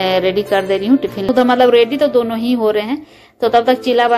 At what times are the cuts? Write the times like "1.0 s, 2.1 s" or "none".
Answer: 1.3 s